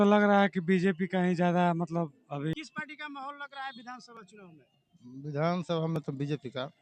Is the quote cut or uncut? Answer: cut